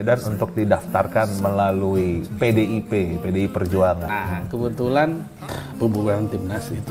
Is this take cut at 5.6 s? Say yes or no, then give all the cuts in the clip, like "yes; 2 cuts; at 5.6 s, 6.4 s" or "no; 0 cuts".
yes; 2 cuts; at 4.1 s, 5.6 s